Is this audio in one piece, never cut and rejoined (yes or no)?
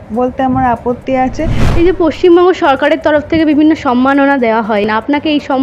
no